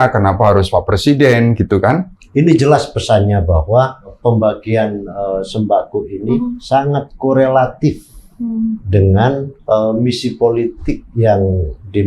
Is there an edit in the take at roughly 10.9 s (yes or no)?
no